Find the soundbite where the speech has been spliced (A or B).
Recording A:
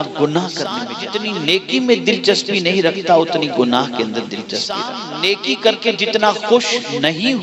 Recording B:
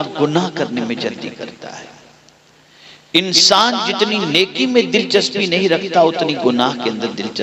A